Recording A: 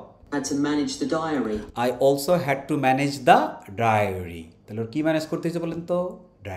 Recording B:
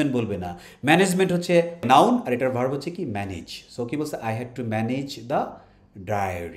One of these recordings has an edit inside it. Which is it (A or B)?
B